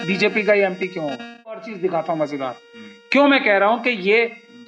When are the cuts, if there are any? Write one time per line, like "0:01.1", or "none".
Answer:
0:01.7

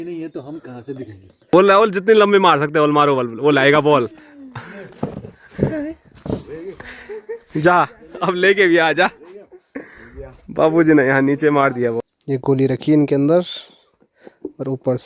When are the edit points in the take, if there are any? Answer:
0:01.5
0:12.0

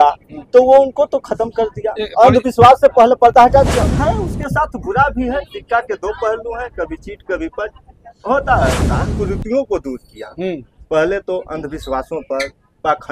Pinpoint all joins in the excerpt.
0:03.9
0:09.0

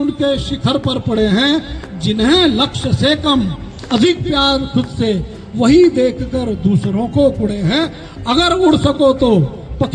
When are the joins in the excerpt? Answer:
none

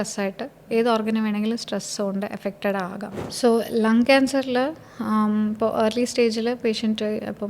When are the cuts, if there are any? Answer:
0:03.3

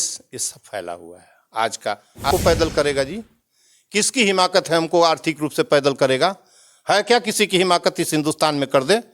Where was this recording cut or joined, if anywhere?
0:02.3

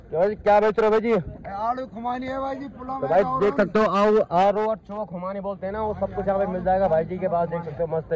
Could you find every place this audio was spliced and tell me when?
none

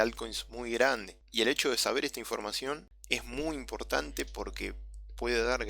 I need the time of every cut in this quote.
0:01.2
0:02.9

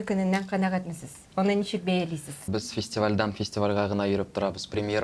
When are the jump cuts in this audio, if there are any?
0:02.5

